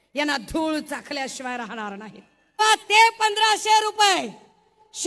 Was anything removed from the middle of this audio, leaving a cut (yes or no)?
yes